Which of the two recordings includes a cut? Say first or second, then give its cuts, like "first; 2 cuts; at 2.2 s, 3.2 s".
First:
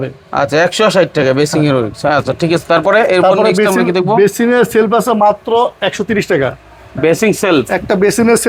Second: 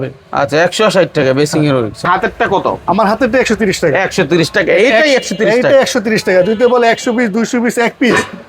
second; 1 cut; at 2.0 s